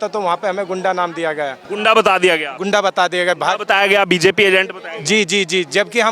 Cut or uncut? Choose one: cut